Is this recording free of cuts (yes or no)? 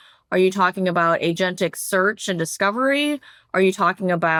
yes